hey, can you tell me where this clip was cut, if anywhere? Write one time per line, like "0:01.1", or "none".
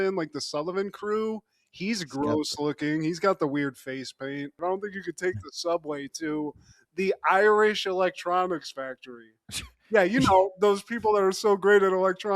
0:04.5